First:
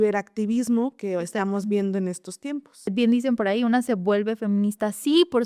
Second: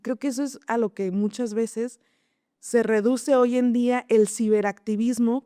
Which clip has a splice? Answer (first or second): first